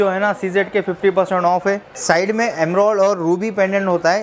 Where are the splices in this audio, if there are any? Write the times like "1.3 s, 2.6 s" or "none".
1.8 s